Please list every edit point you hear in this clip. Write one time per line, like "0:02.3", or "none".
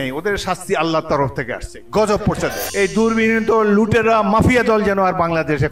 0:02.6